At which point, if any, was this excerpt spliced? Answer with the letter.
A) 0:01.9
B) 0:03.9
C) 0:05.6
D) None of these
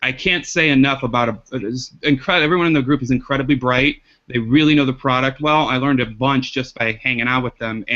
A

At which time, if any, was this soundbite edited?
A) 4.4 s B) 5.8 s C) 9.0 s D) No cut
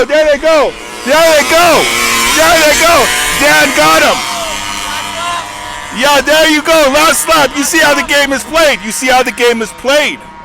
B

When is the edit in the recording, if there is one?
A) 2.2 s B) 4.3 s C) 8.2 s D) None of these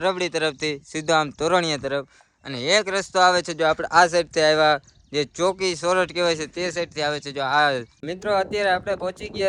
C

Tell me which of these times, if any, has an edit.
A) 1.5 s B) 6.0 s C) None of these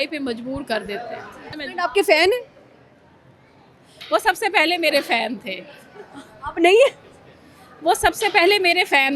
A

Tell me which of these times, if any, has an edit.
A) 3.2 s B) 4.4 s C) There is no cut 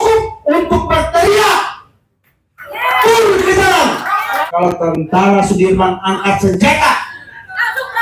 B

